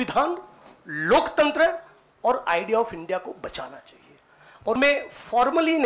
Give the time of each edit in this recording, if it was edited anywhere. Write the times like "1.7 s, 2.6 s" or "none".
4.8 s